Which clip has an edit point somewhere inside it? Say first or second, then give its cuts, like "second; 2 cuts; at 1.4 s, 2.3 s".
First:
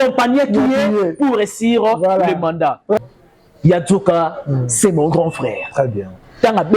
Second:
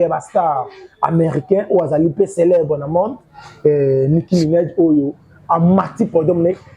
first; 1 cut; at 3.0 s